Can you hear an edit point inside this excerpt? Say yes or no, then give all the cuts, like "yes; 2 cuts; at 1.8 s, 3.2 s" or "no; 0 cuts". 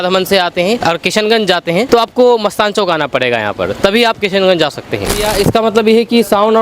yes; 3 cuts; at 0.8 s, 1.9 s, 5.1 s